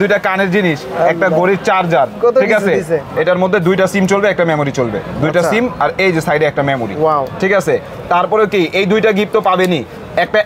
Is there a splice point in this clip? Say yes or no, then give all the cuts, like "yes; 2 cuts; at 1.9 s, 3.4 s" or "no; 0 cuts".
yes; 1 cut; at 3.1 s